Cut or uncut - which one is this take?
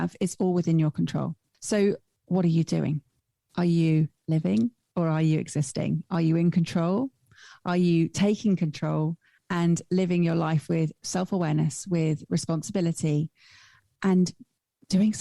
cut